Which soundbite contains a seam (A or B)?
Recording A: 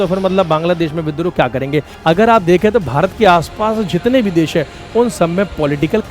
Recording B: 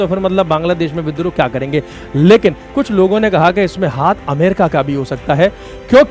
A